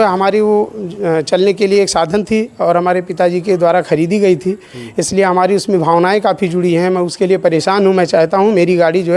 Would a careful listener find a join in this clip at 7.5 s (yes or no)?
no